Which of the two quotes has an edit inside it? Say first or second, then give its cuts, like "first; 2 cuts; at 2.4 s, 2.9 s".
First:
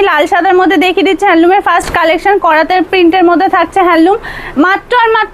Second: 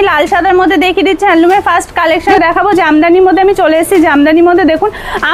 second; 1 cut; at 2.2 s